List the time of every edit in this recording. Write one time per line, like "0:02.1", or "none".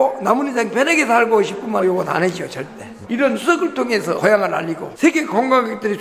none

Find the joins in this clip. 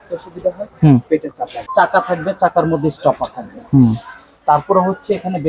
0:01.5

